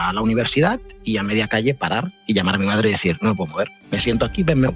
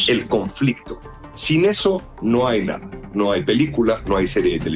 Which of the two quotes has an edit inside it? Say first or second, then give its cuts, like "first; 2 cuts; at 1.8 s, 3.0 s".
first; 3 cuts; at 0.9 s, 2.1 s, 3.8 s